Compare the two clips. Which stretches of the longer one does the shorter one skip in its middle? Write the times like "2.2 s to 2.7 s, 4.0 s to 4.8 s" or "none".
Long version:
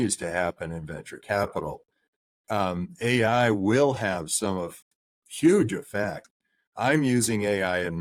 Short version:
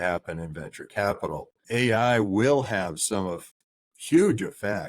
1.9 s to 2.9 s